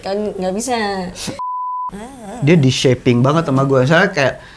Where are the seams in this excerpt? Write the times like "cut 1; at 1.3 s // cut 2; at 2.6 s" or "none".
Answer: cut 1; at 1.7 s